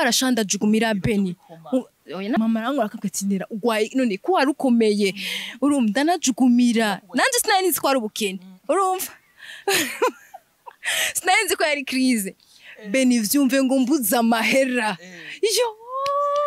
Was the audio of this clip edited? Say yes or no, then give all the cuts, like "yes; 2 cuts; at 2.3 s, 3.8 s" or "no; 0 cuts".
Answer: no; 0 cuts